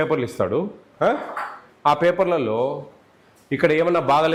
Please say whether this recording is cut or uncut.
uncut